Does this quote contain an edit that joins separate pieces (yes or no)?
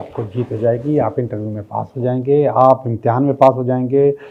no